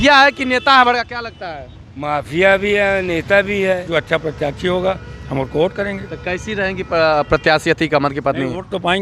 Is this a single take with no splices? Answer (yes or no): no